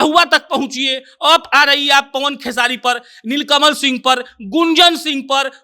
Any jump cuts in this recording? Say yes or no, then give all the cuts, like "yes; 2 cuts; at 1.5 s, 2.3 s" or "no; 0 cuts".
no; 0 cuts